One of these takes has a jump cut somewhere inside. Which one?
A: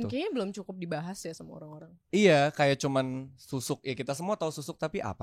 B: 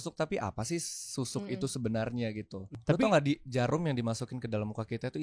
B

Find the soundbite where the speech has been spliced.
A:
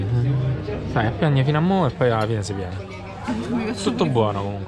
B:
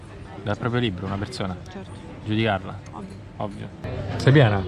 B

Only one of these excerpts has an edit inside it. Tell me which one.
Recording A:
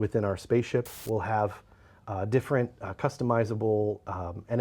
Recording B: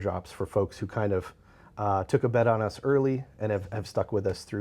A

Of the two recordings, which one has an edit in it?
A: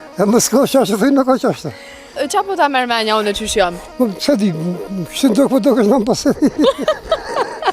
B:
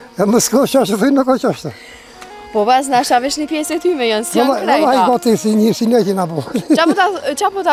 A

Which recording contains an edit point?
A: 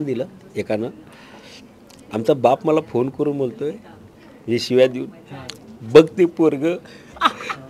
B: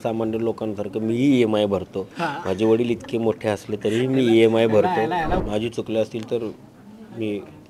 B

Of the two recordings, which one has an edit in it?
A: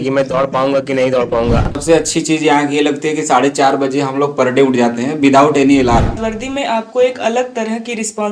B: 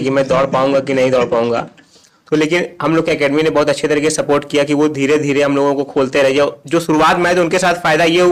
A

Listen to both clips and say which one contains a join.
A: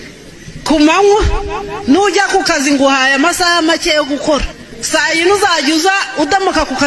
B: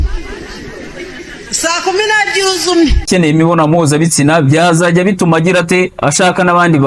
B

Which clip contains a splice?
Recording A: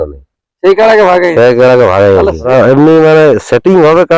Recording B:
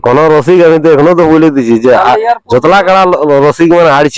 A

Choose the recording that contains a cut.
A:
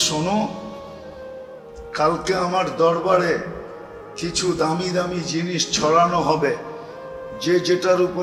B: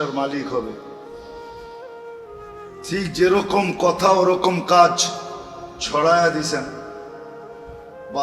B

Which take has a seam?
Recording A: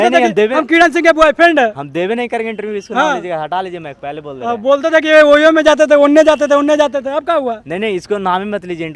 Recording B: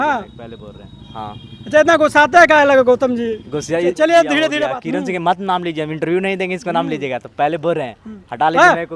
B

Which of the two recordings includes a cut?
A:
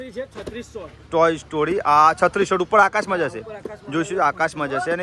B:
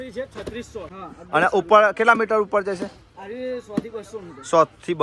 B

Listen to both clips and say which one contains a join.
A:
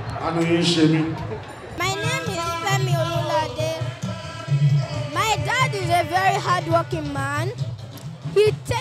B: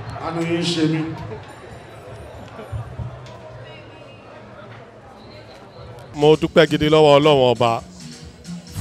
A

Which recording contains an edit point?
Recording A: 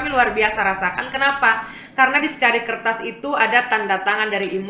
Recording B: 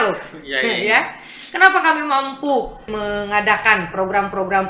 B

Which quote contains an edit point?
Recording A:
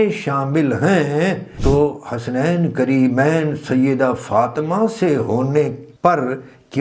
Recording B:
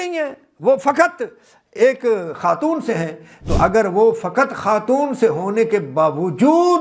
A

